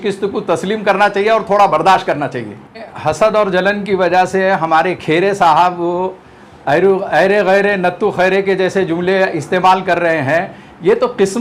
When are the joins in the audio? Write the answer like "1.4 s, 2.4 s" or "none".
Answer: 2.9 s